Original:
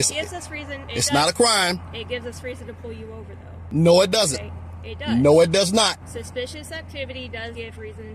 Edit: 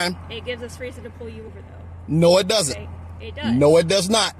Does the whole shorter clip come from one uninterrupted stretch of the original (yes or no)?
yes